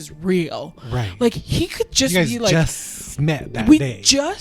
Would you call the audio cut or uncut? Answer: uncut